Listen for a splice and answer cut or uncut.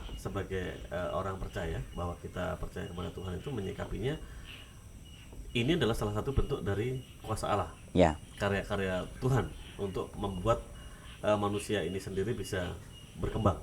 uncut